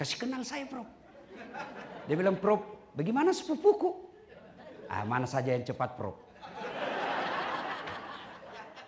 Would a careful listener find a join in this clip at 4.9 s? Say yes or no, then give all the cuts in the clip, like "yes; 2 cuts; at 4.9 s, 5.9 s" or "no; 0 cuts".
no; 0 cuts